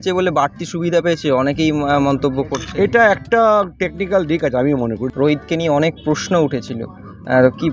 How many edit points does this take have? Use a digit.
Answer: 1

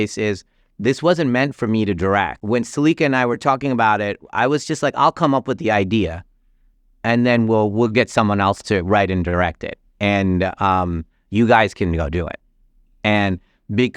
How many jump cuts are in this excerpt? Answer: 1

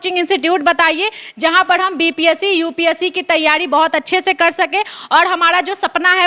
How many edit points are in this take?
0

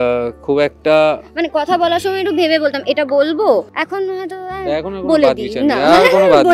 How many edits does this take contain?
1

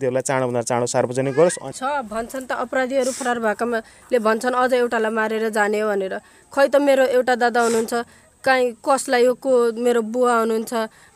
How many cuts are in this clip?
1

